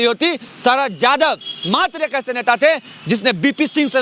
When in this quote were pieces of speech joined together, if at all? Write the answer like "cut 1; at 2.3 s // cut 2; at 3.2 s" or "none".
none